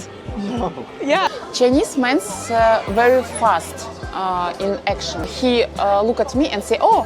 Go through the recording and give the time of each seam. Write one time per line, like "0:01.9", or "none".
0:01.3
0:05.3